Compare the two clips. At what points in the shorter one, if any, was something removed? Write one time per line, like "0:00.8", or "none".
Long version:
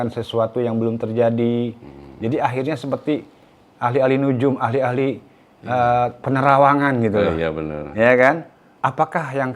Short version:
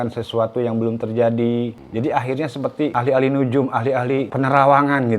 0:01.8
0:02.9
0:04.3